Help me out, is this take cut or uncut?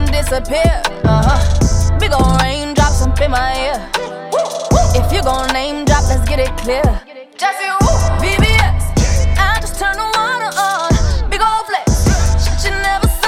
uncut